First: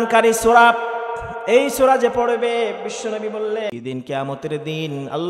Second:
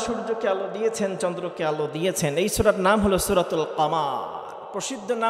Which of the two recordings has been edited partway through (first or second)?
first